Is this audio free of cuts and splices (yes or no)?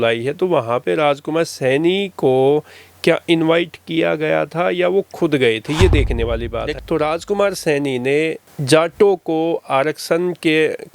no